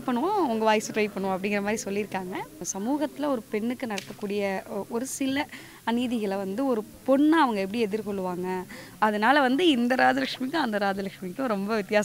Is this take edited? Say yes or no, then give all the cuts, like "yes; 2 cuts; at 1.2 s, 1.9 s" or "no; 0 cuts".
yes; 2 cuts; at 2.7 s, 8.8 s